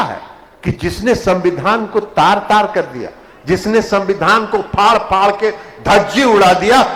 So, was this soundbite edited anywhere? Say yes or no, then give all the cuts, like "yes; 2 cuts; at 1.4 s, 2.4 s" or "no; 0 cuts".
no; 0 cuts